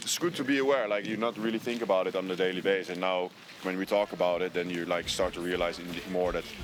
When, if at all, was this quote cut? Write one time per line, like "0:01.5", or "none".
none